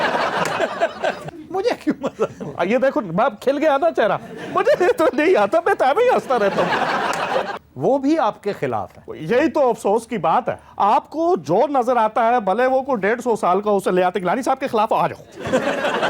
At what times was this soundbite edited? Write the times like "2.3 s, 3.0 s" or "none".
1.2 s, 7.6 s